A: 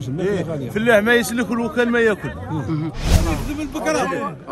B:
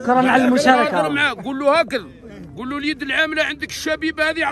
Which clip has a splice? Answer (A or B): A